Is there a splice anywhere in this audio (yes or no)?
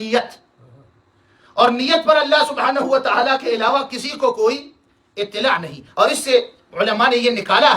yes